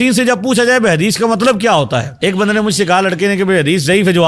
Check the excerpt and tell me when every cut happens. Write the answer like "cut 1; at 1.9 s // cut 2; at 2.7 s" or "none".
cut 1; at 2.1 s